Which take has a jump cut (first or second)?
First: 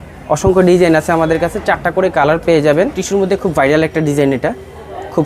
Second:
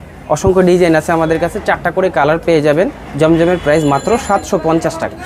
first